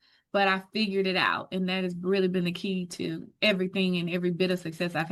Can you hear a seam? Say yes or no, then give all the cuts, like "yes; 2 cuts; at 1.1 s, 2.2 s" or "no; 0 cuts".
no; 0 cuts